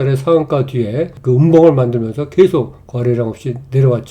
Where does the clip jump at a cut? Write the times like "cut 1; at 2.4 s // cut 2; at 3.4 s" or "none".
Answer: cut 1; at 1.1 s